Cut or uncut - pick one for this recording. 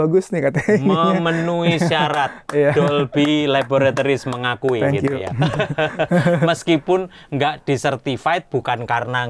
uncut